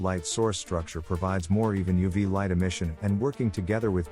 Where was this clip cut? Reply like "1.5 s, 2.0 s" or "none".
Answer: none